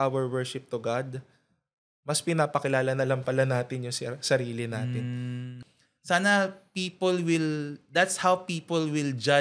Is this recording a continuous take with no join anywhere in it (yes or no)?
no